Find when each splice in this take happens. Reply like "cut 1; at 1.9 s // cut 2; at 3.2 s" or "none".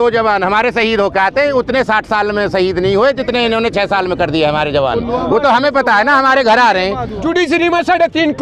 cut 1; at 7.1 s